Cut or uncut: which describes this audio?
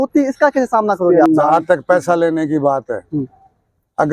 cut